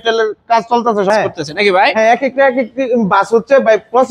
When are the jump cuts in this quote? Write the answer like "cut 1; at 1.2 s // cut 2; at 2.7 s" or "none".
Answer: cut 1; at 1.1 s